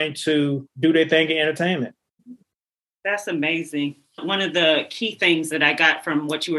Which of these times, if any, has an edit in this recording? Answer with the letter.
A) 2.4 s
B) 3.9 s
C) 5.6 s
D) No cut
D